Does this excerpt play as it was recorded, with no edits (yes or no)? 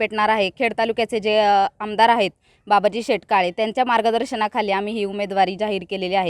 yes